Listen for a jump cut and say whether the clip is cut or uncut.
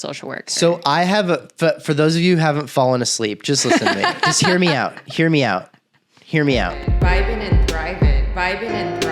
cut